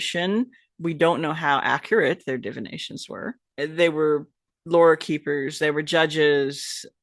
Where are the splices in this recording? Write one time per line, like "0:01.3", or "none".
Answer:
0:03.4